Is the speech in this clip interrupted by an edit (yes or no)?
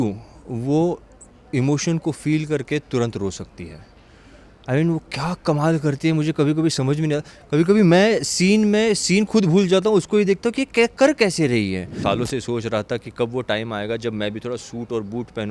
yes